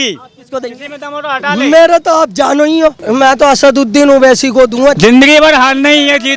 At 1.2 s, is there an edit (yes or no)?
no